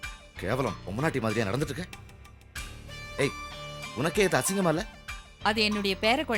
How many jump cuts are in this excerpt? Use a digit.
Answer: 0